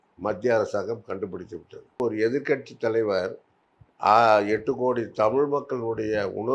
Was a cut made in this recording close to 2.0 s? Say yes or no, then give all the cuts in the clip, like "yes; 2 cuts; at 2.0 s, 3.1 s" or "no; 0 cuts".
yes; 1 cut; at 2.0 s